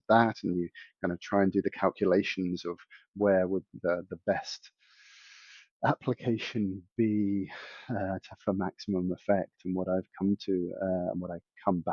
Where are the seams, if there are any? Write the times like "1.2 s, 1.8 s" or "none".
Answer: none